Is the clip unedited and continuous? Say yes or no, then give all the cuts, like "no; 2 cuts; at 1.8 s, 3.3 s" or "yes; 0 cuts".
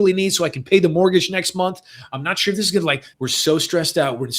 no; 1 cut; at 3.1 s